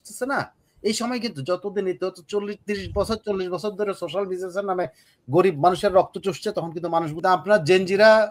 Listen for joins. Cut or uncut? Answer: cut